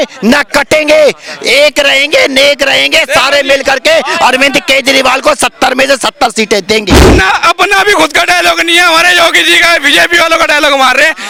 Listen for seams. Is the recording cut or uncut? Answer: uncut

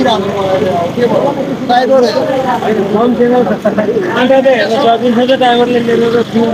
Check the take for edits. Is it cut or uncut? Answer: uncut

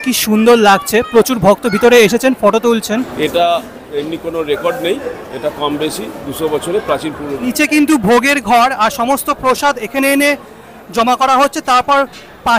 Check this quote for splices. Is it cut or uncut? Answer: cut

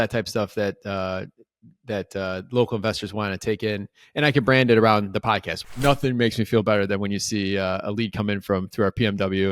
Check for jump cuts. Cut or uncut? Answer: cut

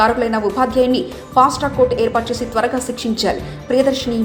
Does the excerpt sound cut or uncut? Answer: uncut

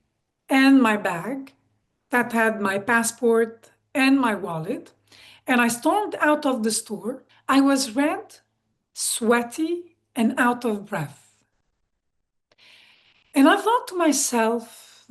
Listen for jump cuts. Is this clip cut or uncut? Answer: cut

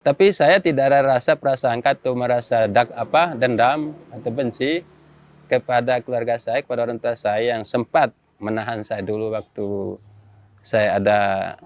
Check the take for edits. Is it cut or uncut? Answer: uncut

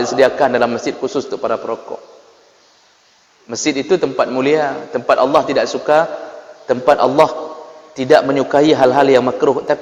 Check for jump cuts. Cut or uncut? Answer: uncut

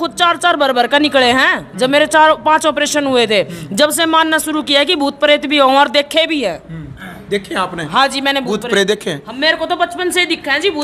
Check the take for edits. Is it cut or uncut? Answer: uncut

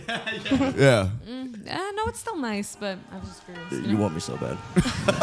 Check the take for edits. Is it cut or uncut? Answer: uncut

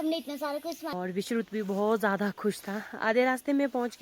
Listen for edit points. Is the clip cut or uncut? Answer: cut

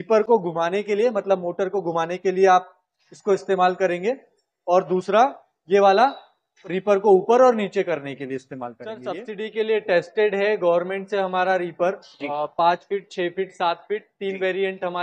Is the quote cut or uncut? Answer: cut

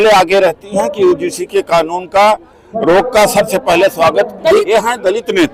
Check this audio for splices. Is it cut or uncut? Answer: cut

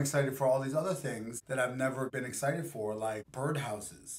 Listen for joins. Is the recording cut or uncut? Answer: cut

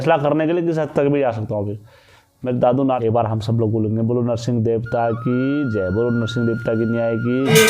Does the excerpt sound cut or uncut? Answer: cut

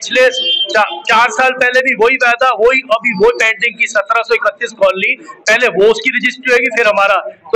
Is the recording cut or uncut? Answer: uncut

